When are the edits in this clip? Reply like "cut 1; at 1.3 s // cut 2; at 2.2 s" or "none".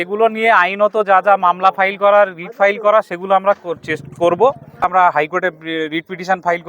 cut 1; at 4.9 s